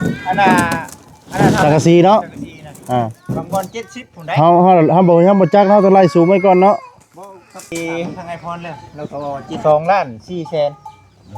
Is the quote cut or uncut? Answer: cut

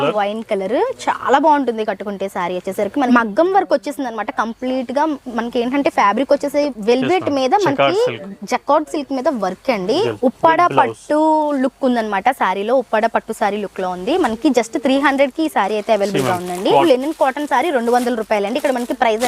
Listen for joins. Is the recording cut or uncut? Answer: cut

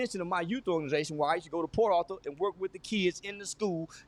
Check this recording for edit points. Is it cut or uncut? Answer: uncut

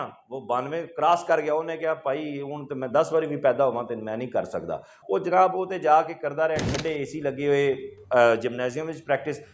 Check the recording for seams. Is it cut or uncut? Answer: cut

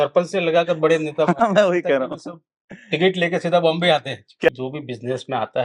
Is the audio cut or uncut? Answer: cut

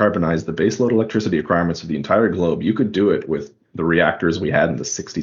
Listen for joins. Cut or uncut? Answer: uncut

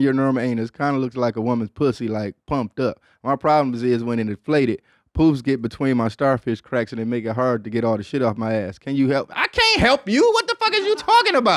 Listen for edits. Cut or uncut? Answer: uncut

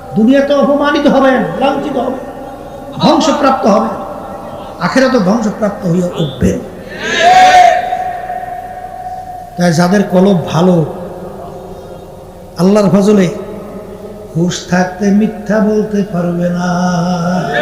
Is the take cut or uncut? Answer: uncut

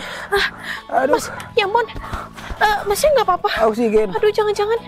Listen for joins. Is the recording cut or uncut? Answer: uncut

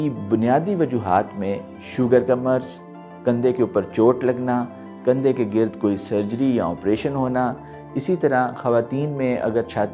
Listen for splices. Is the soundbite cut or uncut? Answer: uncut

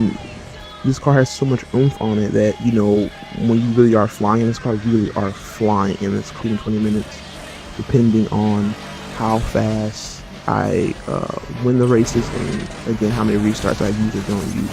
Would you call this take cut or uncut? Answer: uncut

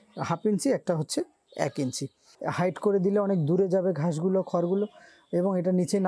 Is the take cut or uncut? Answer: cut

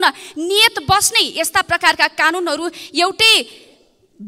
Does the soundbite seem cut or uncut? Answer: uncut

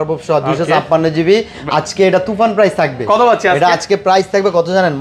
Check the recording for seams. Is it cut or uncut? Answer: uncut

